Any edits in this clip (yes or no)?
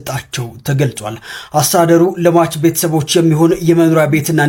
no